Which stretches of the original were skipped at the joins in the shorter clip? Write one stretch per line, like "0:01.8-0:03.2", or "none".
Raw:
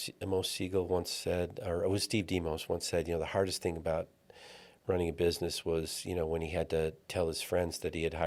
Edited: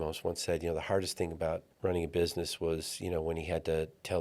0:04.1-0:04.7